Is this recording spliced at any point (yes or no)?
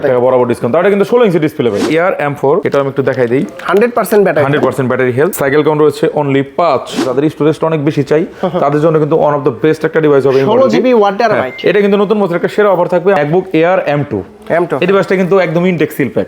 yes